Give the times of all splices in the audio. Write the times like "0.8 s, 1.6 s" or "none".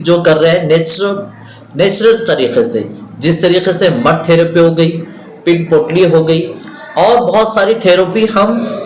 none